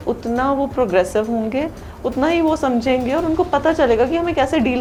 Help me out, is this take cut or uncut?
uncut